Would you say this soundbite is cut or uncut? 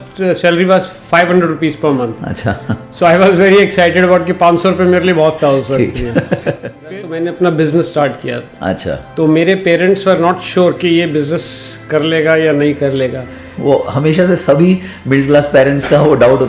cut